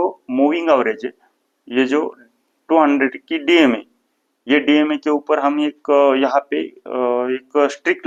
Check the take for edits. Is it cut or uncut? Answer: uncut